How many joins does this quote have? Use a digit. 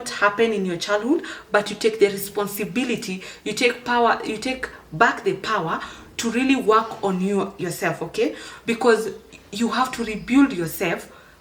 0